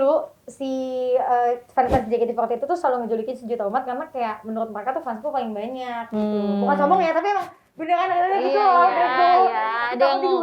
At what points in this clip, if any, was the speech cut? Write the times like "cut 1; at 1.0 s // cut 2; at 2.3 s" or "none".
none